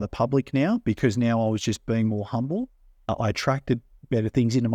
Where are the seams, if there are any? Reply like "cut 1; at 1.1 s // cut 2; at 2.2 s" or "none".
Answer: cut 1; at 3.1 s